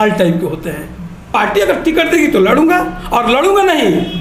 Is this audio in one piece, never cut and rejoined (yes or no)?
no